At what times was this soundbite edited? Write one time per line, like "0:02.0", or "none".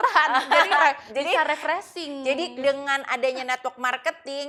none